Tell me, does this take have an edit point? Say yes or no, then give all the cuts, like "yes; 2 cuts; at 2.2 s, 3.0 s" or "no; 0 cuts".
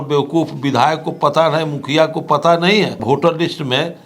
yes; 1 cut; at 3.0 s